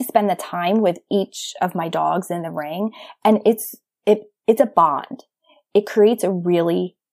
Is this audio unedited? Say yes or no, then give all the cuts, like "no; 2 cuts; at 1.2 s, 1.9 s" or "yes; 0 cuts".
yes; 0 cuts